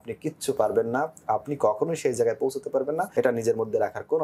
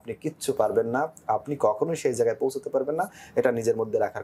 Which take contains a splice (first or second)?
first